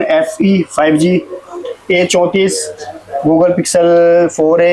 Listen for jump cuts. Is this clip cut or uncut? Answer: uncut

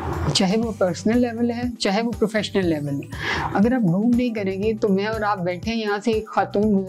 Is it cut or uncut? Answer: uncut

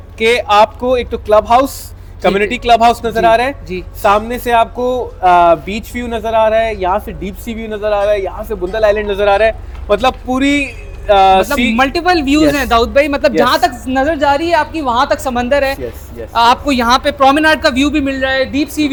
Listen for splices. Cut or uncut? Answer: uncut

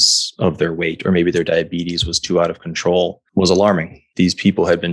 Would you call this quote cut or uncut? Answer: cut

